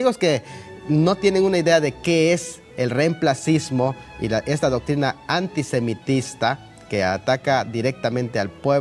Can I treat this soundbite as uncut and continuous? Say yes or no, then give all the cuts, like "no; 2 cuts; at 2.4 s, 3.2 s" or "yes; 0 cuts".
no; 1 cut; at 5.1 s